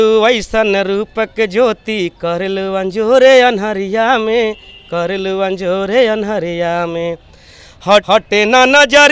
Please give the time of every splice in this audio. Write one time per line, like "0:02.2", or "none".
0:08.0